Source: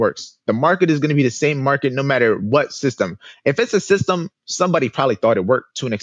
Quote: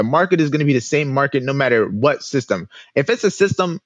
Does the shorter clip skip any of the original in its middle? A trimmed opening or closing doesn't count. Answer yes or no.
no